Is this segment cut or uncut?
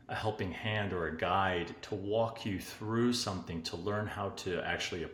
uncut